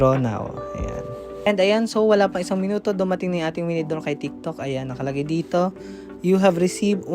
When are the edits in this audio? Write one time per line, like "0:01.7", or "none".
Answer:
0:01.5